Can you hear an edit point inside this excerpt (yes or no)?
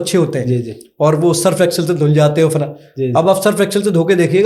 no